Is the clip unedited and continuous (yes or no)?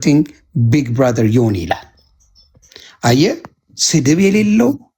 yes